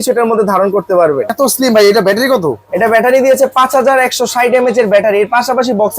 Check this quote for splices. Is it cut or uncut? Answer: cut